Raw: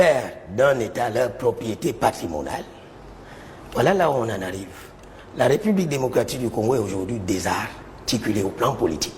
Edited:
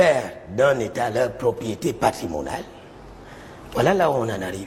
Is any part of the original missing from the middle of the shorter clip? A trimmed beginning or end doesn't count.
no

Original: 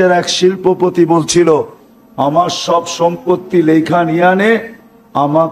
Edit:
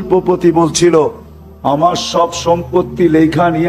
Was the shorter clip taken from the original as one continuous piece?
yes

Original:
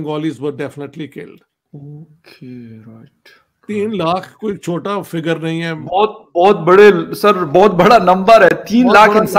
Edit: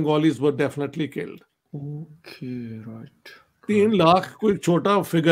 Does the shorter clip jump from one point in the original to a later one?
no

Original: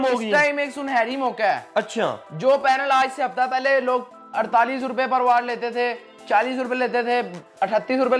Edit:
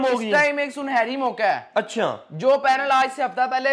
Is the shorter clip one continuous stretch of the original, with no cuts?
yes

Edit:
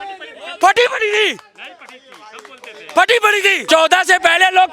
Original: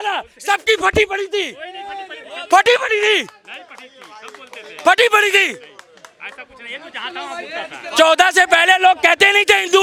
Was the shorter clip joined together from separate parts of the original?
yes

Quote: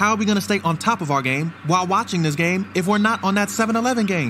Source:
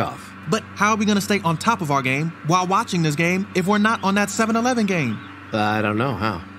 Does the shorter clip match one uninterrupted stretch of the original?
yes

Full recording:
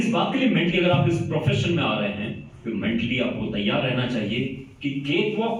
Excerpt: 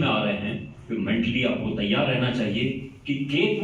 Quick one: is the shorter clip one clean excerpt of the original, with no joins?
yes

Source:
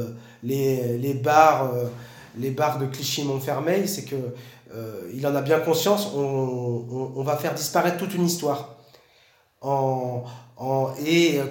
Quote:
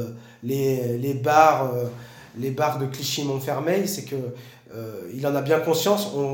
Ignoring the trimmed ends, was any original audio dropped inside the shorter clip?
no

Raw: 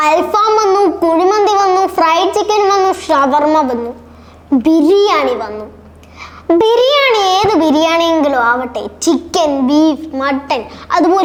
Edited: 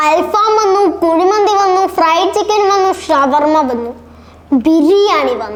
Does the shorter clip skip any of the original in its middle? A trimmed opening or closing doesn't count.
no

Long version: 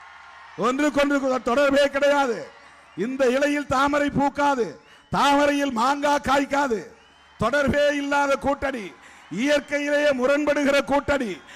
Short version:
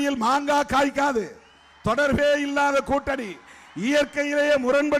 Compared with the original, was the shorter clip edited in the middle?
no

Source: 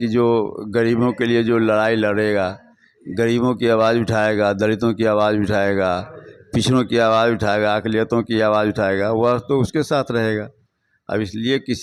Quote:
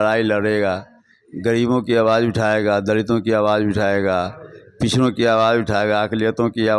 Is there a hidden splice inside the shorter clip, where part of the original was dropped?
no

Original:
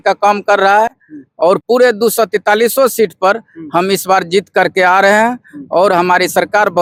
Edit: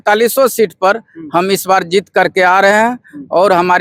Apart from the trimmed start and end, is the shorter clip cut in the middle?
no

